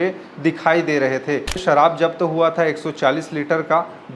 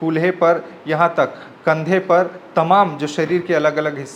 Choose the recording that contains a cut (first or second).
first